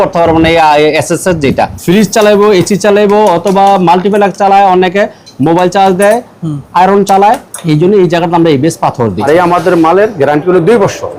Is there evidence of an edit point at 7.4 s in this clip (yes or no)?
no